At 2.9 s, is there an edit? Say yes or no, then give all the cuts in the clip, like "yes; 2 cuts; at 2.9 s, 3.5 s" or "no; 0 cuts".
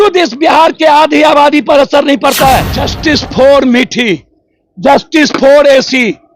yes; 1 cut; at 2.9 s